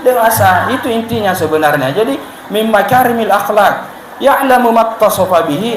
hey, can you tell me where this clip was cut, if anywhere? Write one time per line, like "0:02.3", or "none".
none